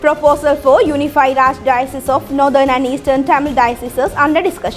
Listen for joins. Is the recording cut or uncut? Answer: uncut